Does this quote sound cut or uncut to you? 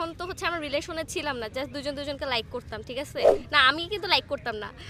uncut